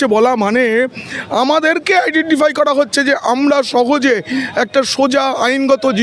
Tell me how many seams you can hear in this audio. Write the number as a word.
zero